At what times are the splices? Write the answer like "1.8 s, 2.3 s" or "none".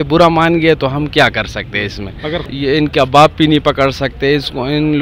2.4 s